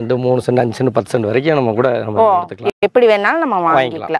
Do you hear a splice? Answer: no; 0 cuts

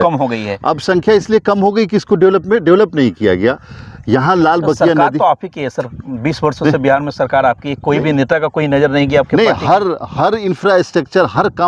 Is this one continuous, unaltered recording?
yes; 0 cuts

